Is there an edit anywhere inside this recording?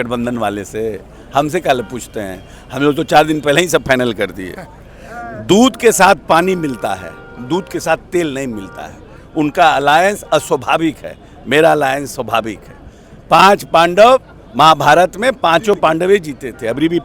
no; 0 cuts

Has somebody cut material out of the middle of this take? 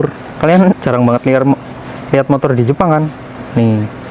no; 0 cuts

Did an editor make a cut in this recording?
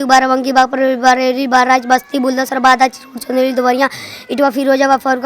no; 0 cuts

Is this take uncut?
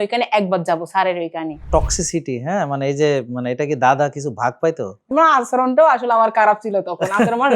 no; 2 cuts; at 1.7 s, 5.1 s

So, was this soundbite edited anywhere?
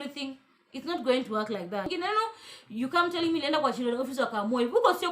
yes; 1 cut; at 1.9 s

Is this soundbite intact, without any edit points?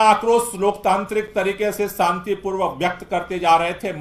yes; 0 cuts

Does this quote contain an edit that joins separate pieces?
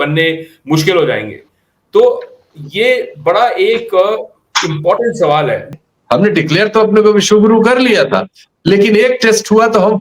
yes; 1 cut; at 5.7 s

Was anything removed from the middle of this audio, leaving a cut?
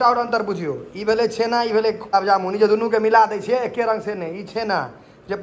yes; 1 cut; at 2.1 s

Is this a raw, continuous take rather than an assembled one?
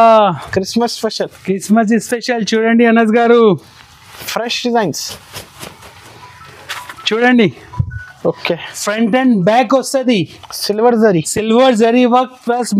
yes; 0 cuts

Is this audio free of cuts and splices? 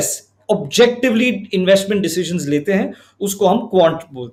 yes; 0 cuts

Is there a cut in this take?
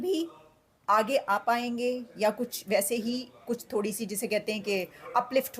no; 0 cuts

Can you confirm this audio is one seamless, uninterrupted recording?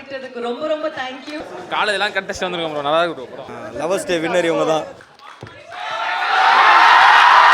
no; 3 cuts; at 1.4 s, 3.4 s, 5.2 s

